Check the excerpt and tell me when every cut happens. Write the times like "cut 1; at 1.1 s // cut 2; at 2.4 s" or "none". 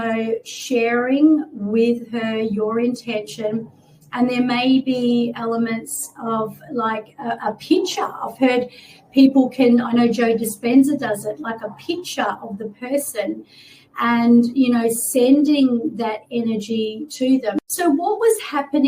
cut 1; at 17.6 s